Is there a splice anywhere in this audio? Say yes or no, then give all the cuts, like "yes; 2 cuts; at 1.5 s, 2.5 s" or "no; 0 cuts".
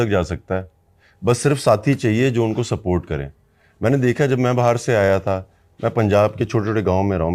no; 0 cuts